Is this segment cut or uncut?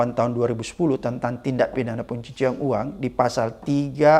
uncut